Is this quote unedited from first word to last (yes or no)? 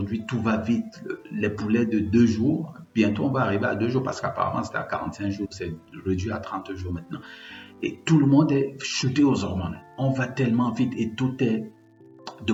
yes